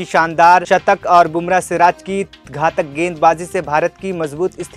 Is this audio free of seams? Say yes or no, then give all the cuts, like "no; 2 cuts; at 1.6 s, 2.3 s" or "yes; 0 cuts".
yes; 0 cuts